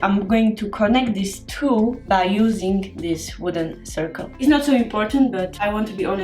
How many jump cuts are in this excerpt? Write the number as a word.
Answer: one